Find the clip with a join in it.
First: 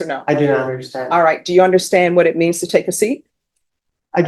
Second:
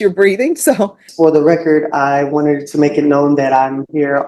second; 1 cut; at 1.0 s

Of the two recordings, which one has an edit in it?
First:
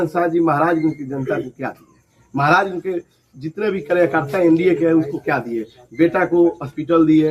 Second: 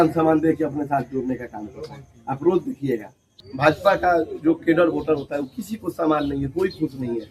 second; 1 cut; at 3.3 s

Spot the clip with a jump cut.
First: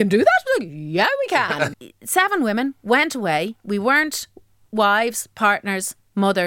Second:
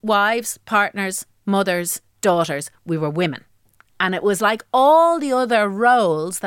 first; 2 cuts; at 1.8 s, 3.6 s

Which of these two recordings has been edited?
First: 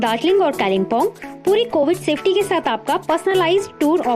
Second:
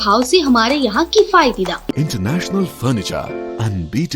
second; 1 cut; at 1.9 s

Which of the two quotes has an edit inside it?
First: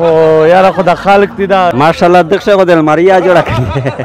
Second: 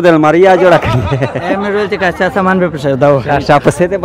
first; 1 cut; at 1.7 s

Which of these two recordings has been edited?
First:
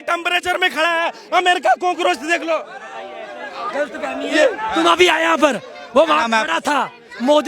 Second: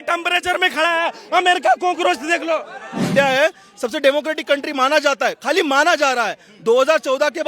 second; 1 cut; at 3.1 s

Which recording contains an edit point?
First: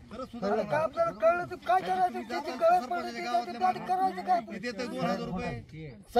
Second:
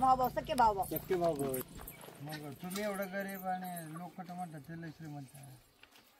second; 1 cut; at 1.5 s

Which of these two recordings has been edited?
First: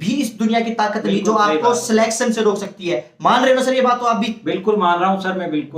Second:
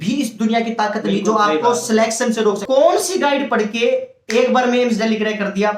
second; 1 cut; at 2.6 s

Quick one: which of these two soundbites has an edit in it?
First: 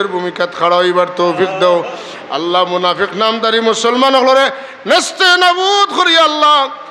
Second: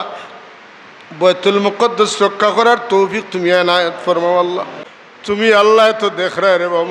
second; 1 cut; at 4.7 s

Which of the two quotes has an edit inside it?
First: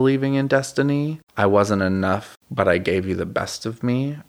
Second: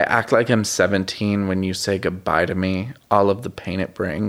first; 2 cuts; at 1.2 s, 2.4 s

